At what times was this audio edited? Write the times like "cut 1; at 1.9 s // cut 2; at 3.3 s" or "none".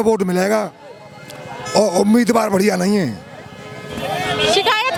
none